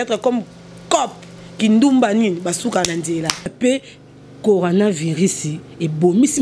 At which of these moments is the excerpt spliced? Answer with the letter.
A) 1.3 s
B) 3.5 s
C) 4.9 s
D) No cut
B